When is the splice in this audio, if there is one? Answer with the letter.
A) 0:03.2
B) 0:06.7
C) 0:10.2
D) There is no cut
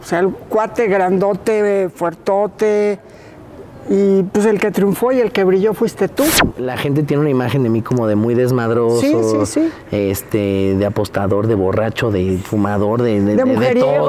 B